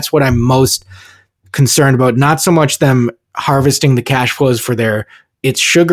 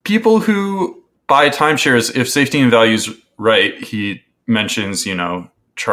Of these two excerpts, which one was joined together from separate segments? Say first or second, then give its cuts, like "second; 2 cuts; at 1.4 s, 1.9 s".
second; 1 cut; at 1.1 s